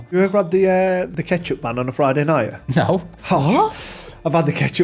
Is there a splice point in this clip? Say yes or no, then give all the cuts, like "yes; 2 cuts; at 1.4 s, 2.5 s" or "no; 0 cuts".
yes; 1 cut; at 1.1 s